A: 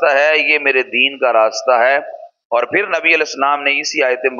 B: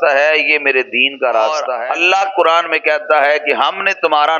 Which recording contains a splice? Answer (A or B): B